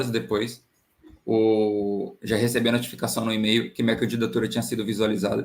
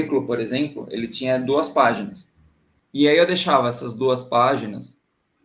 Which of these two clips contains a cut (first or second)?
second